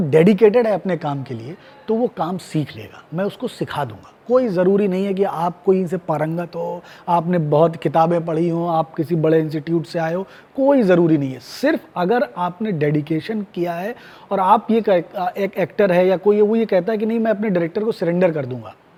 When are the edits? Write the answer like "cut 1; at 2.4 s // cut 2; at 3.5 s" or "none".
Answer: none